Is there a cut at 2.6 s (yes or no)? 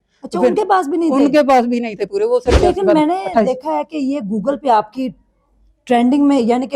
yes